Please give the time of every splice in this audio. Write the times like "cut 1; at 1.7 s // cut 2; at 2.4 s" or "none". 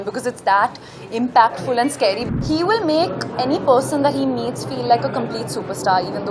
cut 1; at 2.3 s

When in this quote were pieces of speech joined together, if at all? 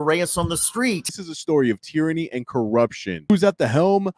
cut 1; at 1.3 s // cut 2; at 3.3 s

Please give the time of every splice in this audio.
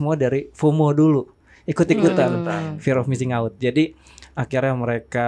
none

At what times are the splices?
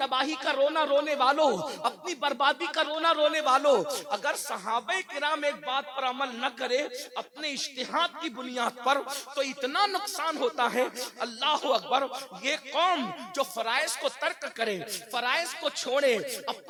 none

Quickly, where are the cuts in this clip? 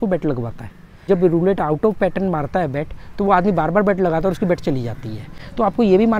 cut 1; at 1.1 s

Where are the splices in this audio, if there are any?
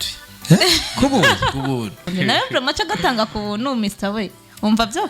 cut 1; at 2.1 s

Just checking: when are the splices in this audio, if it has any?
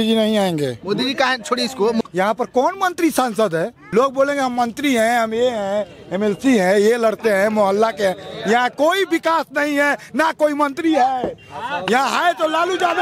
cut 1; at 2.0 s // cut 2; at 3.8 s

